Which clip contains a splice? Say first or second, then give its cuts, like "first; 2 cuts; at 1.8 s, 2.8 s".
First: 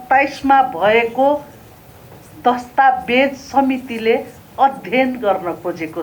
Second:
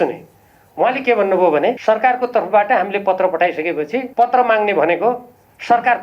second; 2 cuts; at 1.8 s, 4.1 s